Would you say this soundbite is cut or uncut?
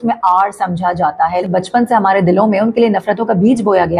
cut